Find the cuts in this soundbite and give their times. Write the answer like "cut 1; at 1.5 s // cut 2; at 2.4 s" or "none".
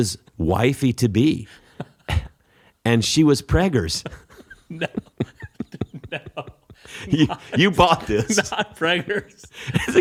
none